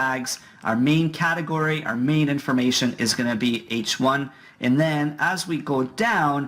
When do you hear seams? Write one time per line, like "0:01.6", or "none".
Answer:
0:05.4